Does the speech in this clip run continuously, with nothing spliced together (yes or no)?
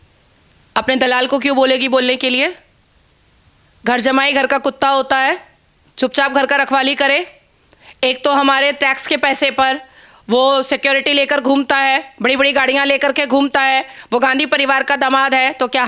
yes